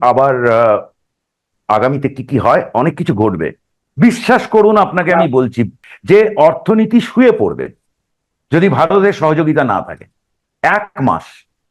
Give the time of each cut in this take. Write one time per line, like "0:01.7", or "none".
0:03.7
0:05.8

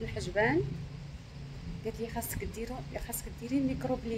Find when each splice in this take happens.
none

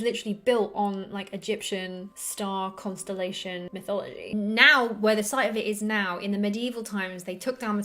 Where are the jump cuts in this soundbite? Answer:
0:04.2

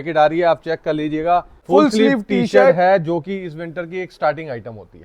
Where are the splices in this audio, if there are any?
0:01.6

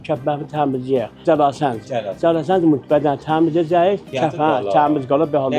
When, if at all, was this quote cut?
0:01.2
0:04.1

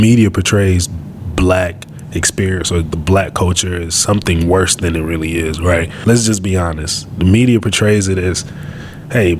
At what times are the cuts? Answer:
0:05.9

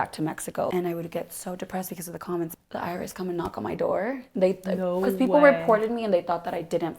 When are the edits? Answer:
0:00.7
0:02.5

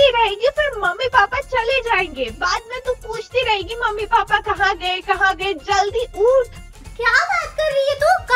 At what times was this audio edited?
0:06.9

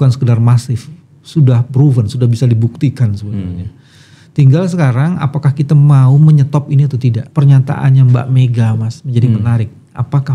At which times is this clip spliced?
0:07.2

